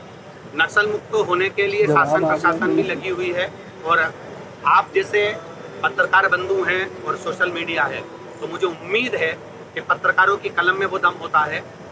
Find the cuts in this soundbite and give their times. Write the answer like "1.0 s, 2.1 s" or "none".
none